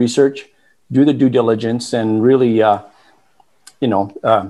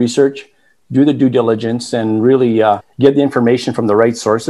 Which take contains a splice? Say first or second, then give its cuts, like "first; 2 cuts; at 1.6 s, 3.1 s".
second; 1 cut; at 2.9 s